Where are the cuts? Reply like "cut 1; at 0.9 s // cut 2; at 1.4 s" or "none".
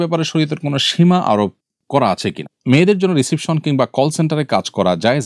cut 1; at 2.5 s

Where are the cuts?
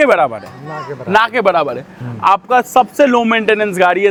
none

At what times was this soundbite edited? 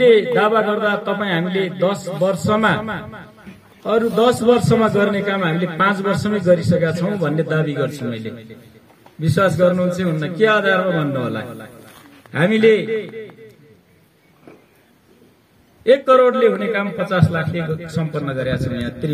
none

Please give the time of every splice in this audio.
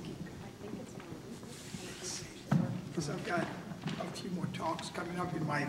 cut 1; at 4.5 s

